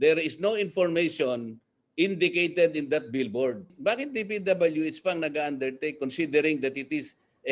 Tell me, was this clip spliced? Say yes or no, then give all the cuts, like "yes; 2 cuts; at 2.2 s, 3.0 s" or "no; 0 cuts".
yes; 1 cut; at 3.7 s